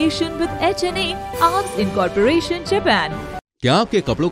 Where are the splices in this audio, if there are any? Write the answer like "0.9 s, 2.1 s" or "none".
3.4 s